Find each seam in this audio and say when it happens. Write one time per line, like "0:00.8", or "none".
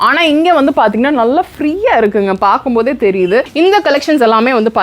0:03.5

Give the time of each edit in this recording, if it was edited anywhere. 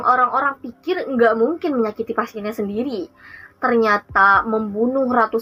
none

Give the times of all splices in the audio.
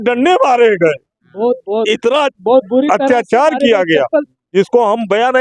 none

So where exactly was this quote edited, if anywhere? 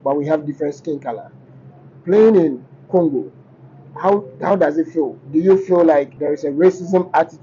0:06.1

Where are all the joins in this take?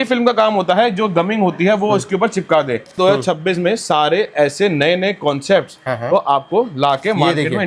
0:02.9

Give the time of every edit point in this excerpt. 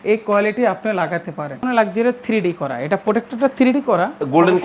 0:01.6

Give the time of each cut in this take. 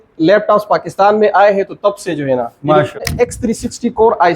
0:03.0

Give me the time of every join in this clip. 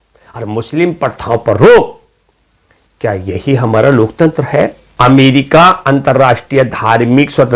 0:04.8

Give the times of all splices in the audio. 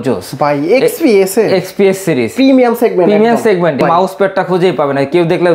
0:03.8

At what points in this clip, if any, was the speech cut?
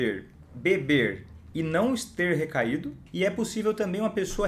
0:03.0

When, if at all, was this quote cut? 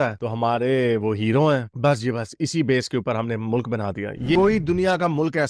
0:04.3

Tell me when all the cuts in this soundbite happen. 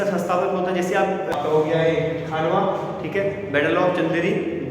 0:01.3

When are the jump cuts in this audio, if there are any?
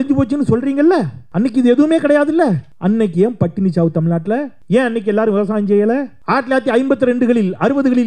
0:01.2
0:02.7
0:04.6
0:06.1

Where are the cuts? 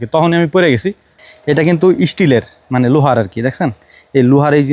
0:01.2

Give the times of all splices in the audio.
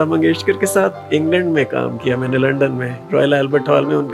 0:01.0

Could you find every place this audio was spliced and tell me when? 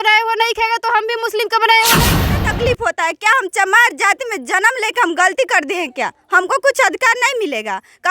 0:02.2

